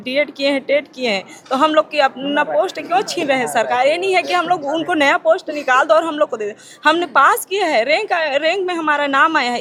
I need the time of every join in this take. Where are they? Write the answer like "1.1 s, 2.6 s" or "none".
none